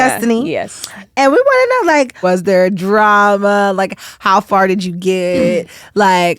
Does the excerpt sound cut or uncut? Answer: cut